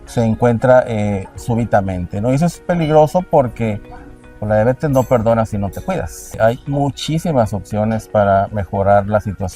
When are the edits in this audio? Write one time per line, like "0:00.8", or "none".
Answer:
0:06.2